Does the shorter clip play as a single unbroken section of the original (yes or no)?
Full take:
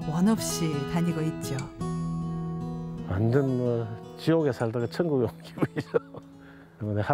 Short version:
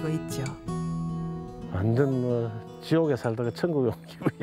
no